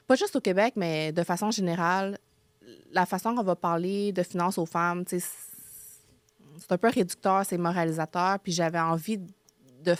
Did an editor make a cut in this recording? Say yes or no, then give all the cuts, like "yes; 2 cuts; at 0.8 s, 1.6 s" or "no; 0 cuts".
no; 0 cuts